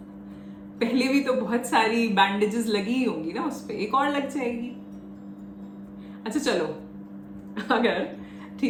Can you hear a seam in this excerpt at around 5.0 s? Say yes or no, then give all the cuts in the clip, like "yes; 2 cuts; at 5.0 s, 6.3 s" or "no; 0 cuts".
no; 0 cuts